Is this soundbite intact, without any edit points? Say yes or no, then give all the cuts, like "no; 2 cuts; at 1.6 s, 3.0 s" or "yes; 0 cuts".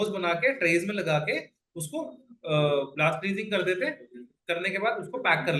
yes; 0 cuts